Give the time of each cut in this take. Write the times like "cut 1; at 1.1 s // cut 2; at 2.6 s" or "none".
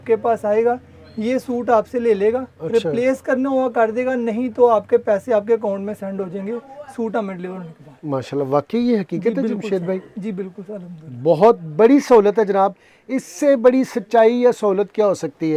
none